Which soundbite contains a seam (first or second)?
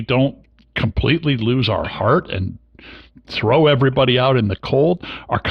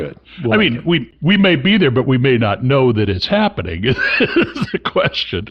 second